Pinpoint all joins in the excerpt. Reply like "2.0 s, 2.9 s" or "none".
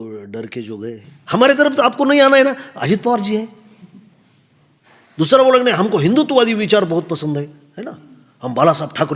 1.1 s